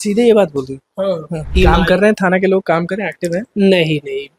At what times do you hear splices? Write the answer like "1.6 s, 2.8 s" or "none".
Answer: 1.5 s